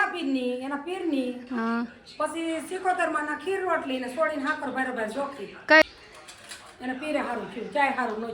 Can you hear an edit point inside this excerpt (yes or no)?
yes